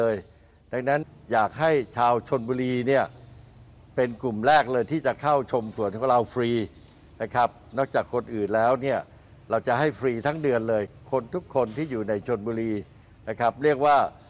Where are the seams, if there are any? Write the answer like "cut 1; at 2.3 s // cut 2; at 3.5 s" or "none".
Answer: cut 1; at 1.2 s